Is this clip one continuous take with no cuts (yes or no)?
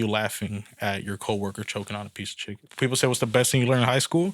no